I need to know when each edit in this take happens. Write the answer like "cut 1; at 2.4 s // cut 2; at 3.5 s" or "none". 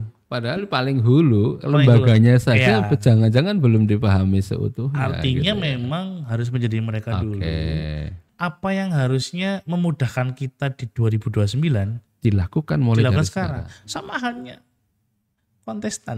cut 1; at 8.2 s